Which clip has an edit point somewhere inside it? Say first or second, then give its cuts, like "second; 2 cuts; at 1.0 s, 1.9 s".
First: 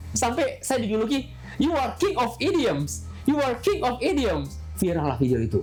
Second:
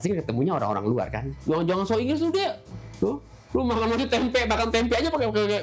second; 1 cut; at 1.2 s